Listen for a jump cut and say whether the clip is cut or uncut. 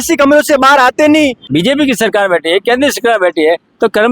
cut